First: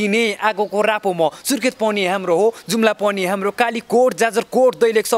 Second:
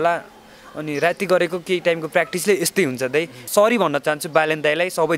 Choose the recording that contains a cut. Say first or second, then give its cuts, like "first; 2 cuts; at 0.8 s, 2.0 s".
second; 1 cut; at 3.5 s